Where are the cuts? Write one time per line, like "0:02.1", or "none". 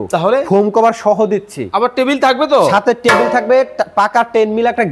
none